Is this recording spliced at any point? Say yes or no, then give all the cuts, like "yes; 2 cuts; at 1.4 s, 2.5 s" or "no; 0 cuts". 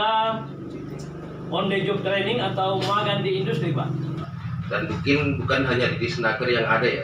yes; 1 cut; at 4.3 s